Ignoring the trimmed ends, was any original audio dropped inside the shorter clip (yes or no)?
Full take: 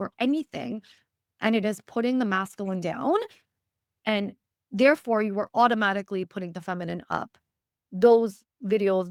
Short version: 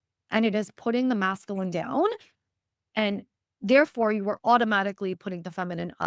no